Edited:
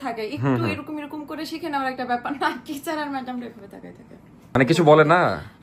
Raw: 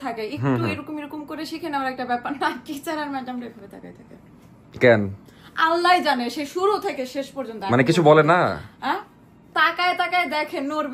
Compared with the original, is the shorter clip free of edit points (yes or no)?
no